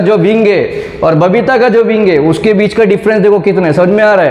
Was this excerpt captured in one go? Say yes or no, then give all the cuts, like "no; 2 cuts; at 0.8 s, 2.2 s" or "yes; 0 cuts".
yes; 0 cuts